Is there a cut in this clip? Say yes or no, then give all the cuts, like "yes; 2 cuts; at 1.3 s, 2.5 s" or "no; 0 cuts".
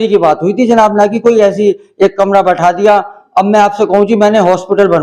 no; 0 cuts